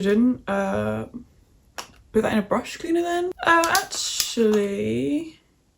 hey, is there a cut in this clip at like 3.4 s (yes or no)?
yes